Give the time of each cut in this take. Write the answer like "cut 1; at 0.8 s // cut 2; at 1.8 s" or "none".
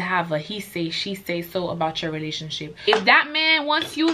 cut 1; at 2.7 s